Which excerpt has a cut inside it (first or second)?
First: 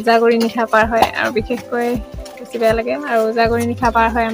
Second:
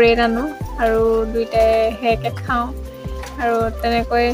first